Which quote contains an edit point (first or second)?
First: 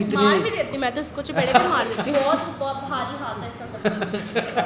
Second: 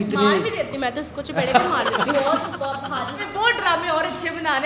second